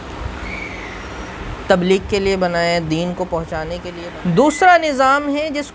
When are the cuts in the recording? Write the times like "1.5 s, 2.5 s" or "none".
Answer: 3.8 s